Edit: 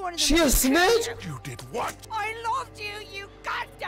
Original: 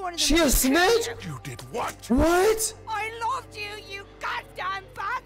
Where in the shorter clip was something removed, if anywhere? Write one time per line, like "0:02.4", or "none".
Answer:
0:01.9